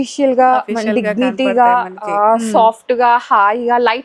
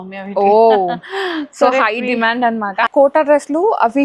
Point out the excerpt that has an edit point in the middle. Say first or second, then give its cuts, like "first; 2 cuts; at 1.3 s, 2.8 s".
second; 1 cut; at 2.9 s